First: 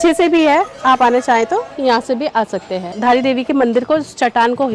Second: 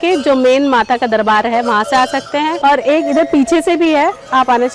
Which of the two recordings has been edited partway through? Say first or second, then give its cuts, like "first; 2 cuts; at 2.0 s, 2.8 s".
first; 1 cut; at 3.0 s